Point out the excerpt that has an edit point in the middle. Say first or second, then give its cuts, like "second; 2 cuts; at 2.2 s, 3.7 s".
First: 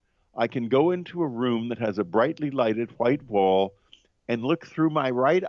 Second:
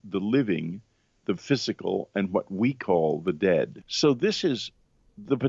second; 1 cut; at 3.8 s